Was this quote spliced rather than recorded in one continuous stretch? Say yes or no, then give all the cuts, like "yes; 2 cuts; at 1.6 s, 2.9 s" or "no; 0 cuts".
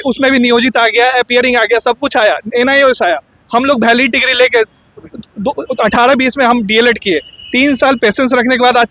no; 0 cuts